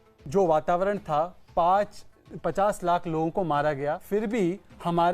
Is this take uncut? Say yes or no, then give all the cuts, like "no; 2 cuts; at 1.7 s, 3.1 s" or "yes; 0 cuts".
no; 1 cut; at 4.0 s